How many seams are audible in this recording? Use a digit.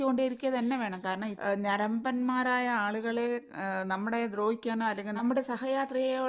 1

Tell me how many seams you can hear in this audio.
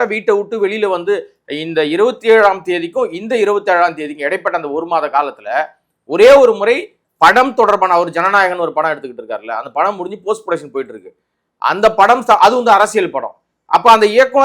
1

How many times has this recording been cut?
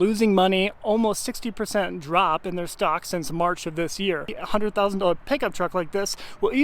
1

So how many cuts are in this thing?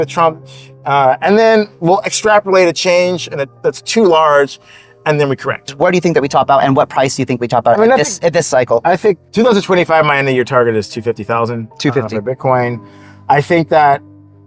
2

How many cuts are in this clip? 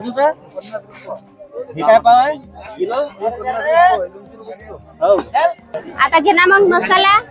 1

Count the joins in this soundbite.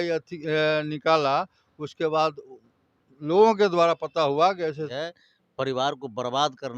1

